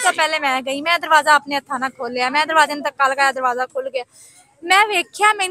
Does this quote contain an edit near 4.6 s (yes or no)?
no